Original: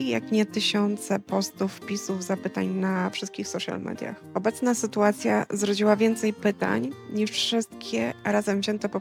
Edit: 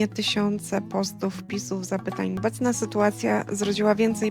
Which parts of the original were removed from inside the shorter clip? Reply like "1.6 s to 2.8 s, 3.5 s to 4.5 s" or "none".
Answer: 2.8 s to 4.4 s